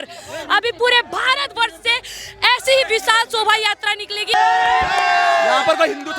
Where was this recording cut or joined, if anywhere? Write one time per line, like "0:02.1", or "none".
0:04.3